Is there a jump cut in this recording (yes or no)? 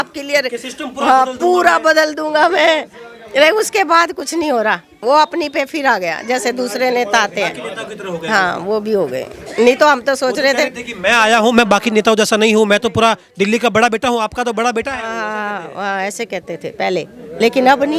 no